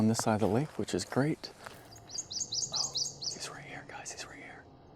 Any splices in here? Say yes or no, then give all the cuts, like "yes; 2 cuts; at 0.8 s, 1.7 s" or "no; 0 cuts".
yes; 1 cut; at 1.7 s